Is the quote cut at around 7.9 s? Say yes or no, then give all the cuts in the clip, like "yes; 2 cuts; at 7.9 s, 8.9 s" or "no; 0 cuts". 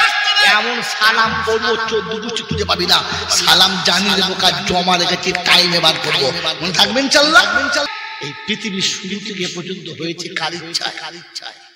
yes; 1 cut; at 7.9 s